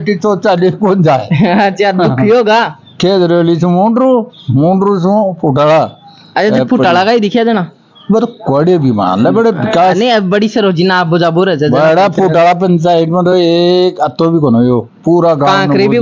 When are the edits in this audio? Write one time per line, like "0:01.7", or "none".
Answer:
none